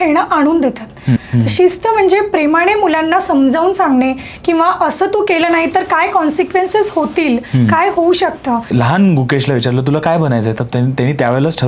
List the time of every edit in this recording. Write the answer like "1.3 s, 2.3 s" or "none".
1.2 s, 8.7 s